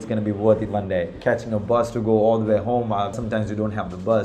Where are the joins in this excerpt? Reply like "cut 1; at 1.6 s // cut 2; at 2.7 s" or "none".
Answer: cut 1; at 1.1 s // cut 2; at 3.2 s